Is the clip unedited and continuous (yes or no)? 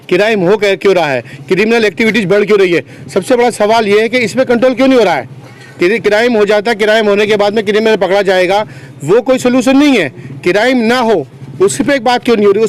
yes